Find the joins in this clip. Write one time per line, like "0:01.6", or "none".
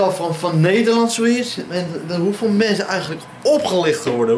none